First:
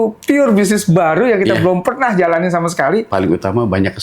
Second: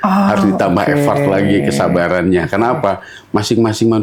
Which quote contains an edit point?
first; 1 cut; at 3.1 s

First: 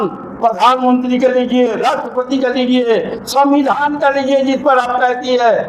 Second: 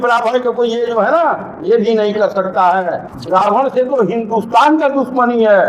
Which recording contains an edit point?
second; 1 cut; at 3.1 s

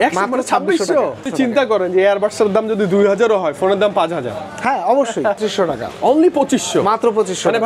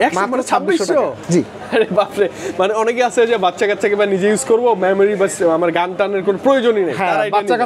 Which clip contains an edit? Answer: first; 2 cuts; at 1.3 s, 5.4 s

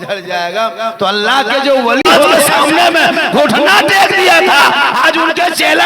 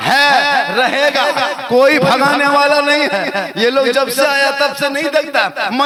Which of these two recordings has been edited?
first; 1 cut; at 2.4 s

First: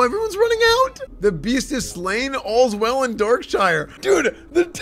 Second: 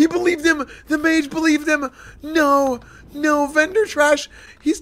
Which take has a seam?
first; 2 cuts; at 1.0 s, 3.9 s

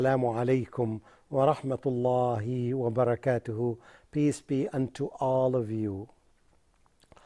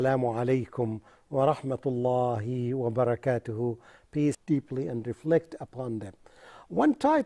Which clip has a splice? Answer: first; 1 cut; at 4.4 s

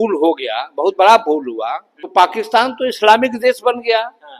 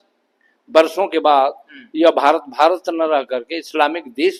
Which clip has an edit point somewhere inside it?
first; 1 cut; at 1.9 s

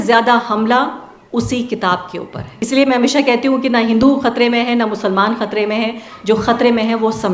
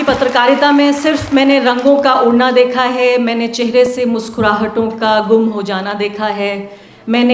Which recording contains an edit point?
first; 1 cut; at 2.5 s

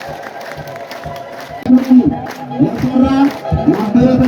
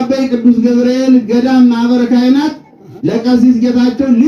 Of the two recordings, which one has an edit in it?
first; 1 cut; at 1.6 s

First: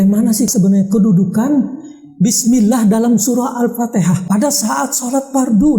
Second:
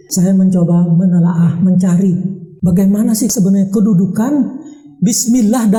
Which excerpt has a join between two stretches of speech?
first; 1 cut; at 4.2 s

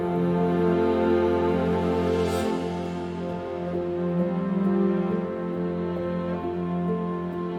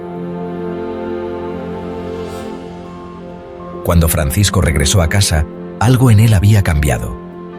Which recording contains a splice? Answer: second; 1 cut; at 3.8 s

